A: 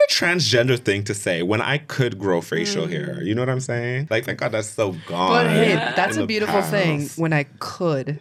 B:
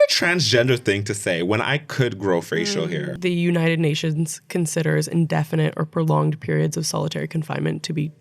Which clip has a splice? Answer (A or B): B